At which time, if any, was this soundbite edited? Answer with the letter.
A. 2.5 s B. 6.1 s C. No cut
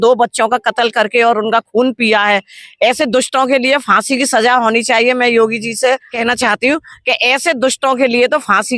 B